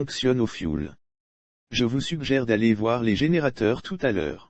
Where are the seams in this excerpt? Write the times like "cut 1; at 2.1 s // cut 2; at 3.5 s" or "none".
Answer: none